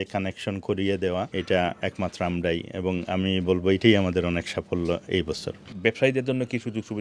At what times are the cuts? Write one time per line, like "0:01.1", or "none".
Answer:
0:01.3
0:05.7